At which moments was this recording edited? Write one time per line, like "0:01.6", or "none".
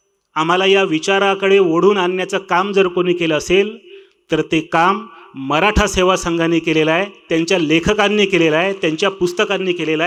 none